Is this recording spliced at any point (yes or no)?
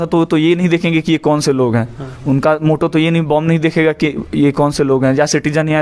no